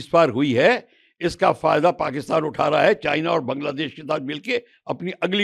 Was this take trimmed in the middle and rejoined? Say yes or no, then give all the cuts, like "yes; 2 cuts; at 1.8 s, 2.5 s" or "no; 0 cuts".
no; 0 cuts